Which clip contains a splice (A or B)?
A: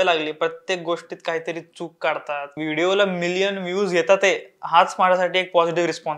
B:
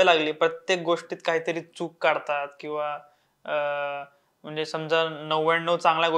A